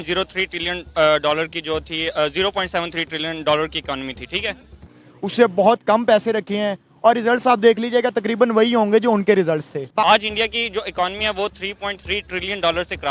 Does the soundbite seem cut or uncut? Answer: cut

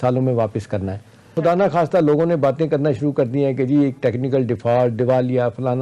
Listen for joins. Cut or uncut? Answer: cut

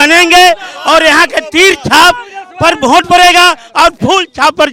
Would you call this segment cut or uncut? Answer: uncut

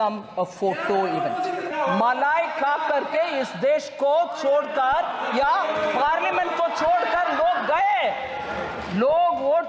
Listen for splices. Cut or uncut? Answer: cut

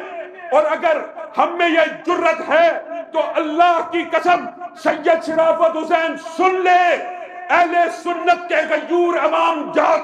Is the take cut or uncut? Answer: uncut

